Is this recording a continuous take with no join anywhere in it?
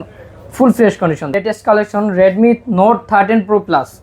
no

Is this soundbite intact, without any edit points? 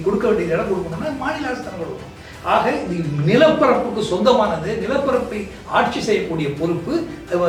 yes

